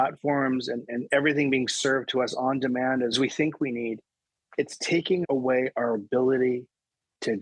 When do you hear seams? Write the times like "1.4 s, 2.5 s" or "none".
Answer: 3.1 s, 5.2 s